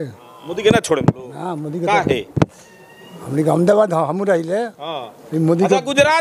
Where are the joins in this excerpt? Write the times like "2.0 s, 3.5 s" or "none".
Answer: none

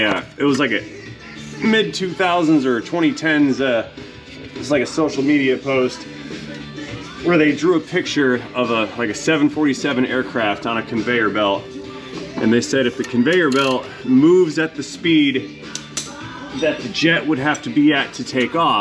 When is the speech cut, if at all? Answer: none

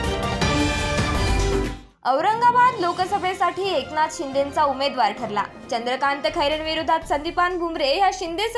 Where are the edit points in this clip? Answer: 1.8 s

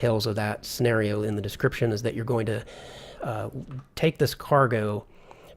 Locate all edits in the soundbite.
4.4 s

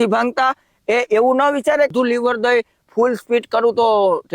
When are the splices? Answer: 1.9 s

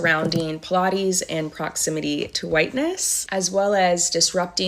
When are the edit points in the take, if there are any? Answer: 3.2 s

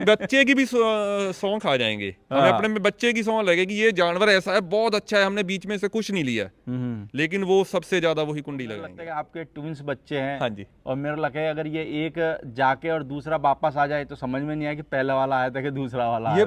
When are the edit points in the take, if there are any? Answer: 9.0 s

